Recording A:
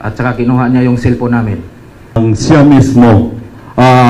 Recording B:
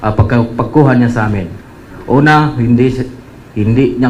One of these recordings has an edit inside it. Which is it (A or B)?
A